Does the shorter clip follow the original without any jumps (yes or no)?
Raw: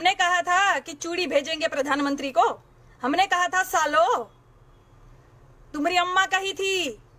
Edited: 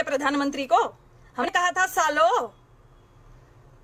no